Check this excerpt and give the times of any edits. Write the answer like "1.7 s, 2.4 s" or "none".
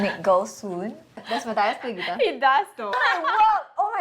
1.2 s, 2.9 s